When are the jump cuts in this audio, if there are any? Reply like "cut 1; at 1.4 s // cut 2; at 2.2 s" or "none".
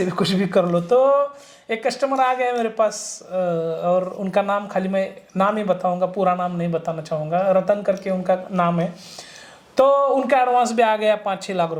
none